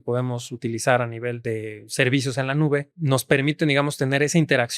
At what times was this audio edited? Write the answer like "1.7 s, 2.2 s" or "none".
1.4 s, 2.9 s